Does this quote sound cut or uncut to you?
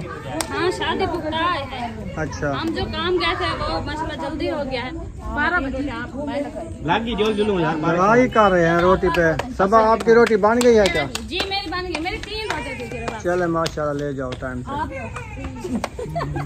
cut